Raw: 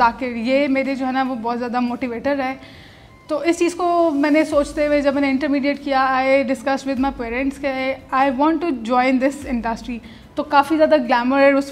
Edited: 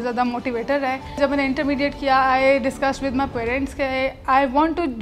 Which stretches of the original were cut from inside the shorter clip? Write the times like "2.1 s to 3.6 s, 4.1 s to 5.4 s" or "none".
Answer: 2.7 s to 5.0 s